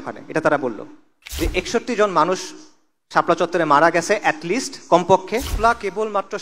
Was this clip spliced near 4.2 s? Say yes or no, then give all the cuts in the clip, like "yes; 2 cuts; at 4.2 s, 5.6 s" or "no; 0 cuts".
no; 2 cuts; at 1.2 s, 5.5 s